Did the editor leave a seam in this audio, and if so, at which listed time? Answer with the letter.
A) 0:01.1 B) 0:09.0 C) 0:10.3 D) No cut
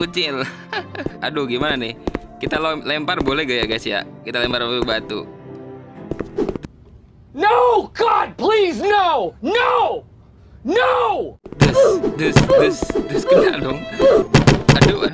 A